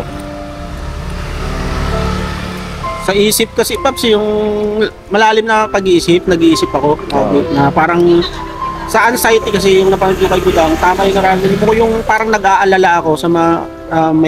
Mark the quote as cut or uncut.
uncut